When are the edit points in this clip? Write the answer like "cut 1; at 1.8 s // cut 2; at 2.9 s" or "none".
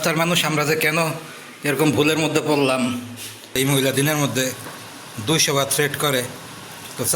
cut 1; at 3.5 s